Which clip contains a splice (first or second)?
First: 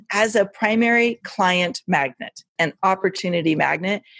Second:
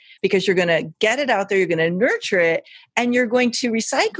first